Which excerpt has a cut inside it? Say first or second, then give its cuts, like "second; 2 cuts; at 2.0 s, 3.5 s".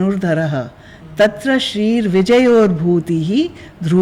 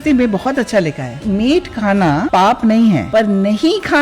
second; 3 cuts; at 1.2 s, 2.3 s, 3.0 s